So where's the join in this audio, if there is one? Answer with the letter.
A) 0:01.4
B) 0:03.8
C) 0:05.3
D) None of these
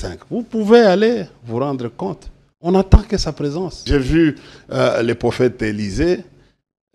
B